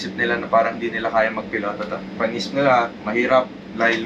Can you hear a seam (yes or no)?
no